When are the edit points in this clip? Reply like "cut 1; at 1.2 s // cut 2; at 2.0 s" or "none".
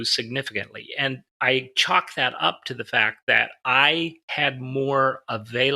cut 1; at 1.3 s